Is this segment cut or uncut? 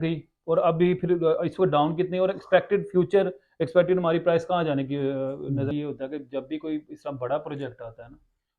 cut